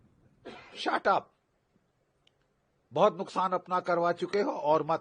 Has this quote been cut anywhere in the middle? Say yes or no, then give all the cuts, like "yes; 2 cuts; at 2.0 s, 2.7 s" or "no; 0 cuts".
no; 0 cuts